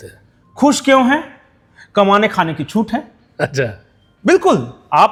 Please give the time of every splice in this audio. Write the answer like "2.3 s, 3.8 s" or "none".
none